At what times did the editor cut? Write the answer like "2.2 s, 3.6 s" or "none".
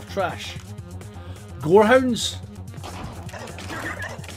2.6 s